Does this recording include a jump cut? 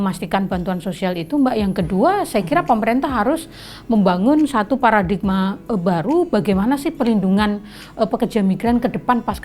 no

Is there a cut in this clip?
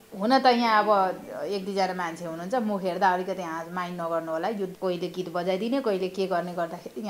yes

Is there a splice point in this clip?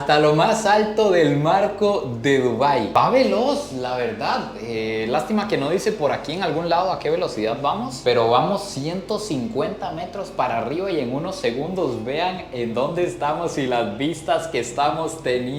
no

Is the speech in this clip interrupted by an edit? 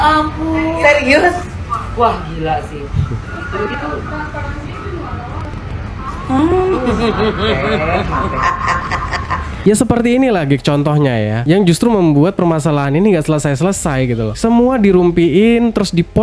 yes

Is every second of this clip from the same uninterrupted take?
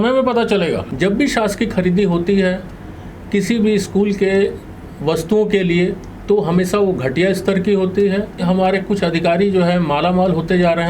no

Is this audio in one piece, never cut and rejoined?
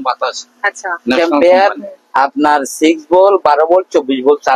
no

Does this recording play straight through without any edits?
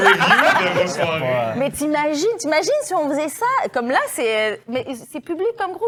yes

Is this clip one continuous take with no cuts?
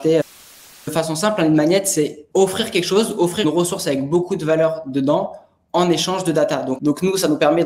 no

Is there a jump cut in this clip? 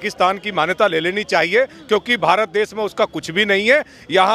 no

